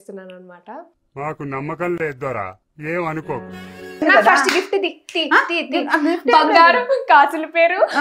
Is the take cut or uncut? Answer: cut